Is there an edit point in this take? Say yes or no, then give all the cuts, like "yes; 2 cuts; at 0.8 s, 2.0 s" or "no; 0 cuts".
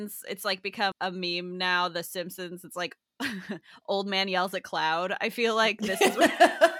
yes; 1 cut; at 0.9 s